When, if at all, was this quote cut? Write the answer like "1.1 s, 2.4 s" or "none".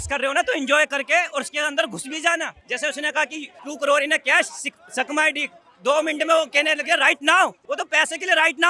2.6 s, 3.5 s, 7.6 s